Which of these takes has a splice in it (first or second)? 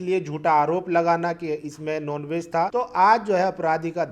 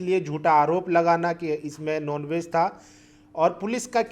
first